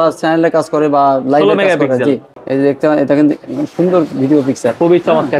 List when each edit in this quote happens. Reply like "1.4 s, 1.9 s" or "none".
2.3 s